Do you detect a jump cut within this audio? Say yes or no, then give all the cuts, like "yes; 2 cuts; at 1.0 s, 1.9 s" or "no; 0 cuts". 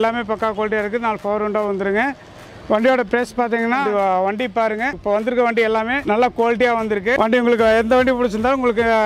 yes; 4 cuts; at 3.8 s, 5.0 s, 6.0 s, 7.2 s